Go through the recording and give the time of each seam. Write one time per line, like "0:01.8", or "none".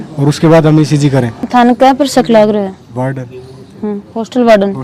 none